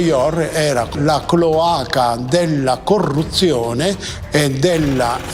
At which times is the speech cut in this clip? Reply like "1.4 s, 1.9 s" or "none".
0.9 s